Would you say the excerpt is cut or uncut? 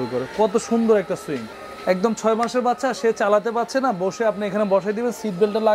cut